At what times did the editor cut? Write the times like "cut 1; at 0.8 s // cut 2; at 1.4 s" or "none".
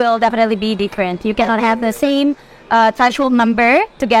none